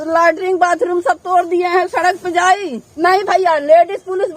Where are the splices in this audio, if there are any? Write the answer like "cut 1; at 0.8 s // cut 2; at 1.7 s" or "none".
cut 1; at 2.9 s